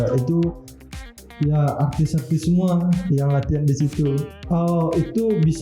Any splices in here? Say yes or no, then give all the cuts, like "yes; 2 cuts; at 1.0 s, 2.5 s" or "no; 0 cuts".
yes; 1 cut; at 4.3 s